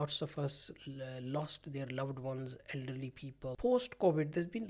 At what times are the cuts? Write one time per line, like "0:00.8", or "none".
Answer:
0:03.6